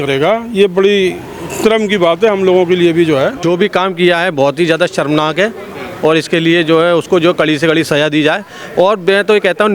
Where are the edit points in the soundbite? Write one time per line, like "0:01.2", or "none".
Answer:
0:03.4